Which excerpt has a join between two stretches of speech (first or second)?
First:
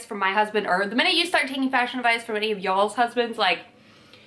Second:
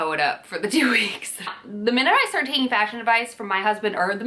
second